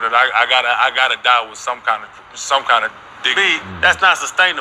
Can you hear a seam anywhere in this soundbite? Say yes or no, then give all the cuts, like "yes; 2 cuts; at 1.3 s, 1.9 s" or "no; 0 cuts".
no; 0 cuts